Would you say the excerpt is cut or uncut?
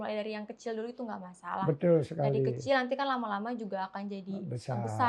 uncut